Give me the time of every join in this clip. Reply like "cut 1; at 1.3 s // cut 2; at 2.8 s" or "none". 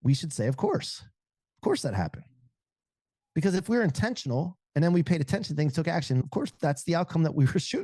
cut 1; at 6.2 s